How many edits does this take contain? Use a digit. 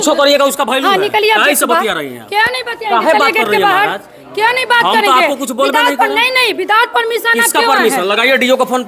0